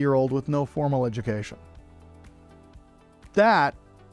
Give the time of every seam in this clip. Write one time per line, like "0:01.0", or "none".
none

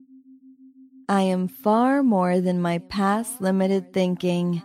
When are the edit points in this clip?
0:01.1

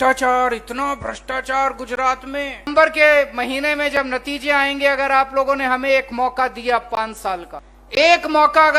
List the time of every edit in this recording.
0:02.7
0:07.8

